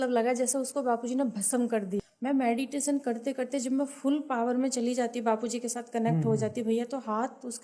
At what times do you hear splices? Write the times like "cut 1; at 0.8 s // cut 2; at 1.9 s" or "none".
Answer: cut 1; at 2.0 s